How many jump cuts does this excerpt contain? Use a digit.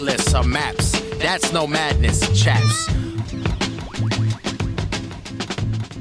1